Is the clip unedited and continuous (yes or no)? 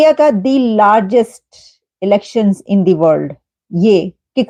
yes